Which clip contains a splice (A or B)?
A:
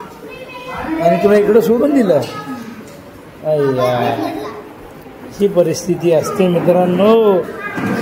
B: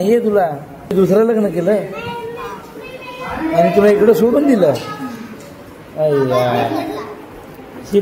B